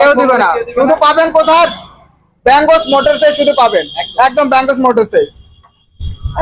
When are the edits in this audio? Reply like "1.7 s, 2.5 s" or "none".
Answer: none